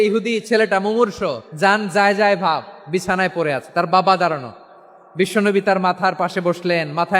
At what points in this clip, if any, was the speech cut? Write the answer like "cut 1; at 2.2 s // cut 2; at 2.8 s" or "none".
cut 1; at 1.5 s